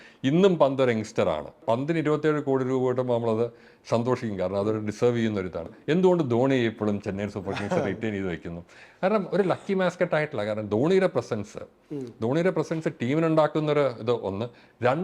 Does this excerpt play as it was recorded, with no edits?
no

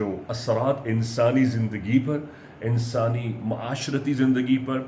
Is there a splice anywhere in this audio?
no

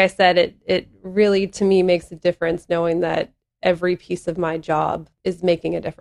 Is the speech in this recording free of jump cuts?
no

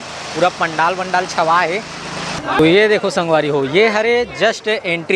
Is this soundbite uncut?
no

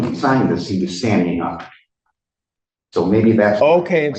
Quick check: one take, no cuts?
yes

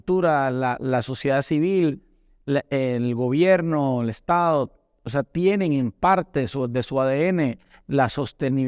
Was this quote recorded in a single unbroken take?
yes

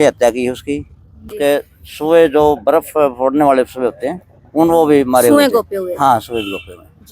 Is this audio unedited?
no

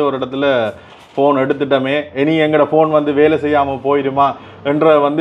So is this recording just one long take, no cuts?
yes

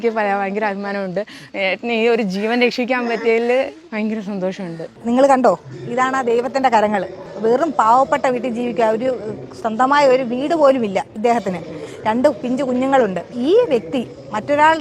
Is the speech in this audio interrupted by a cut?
no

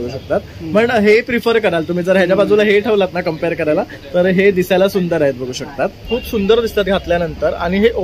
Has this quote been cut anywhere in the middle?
yes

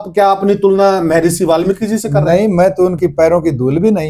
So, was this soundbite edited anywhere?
no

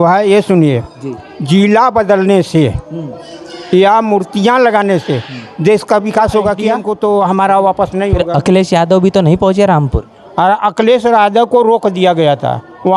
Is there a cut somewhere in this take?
yes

